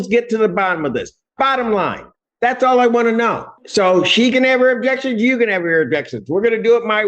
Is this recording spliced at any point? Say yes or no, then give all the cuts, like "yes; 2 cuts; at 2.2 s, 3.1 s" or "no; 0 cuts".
yes; 1 cut; at 3.5 s